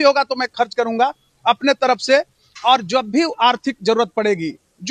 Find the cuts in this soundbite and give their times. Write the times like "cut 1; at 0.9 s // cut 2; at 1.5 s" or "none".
none